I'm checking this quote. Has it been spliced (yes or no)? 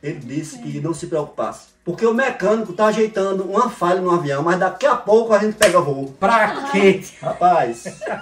yes